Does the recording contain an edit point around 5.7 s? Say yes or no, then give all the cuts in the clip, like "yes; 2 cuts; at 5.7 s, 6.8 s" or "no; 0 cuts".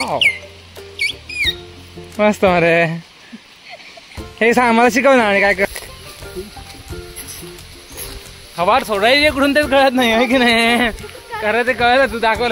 yes; 1 cut; at 5.7 s